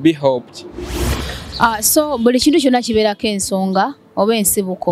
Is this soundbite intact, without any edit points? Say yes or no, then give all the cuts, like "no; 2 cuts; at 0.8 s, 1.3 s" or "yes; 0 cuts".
no; 1 cut; at 1.3 s